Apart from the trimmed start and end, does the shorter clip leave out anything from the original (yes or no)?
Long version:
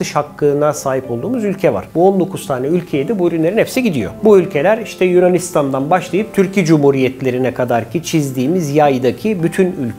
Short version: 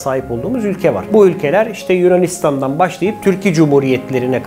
yes